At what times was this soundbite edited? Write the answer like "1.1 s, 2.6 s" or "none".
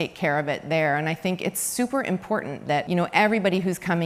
2.9 s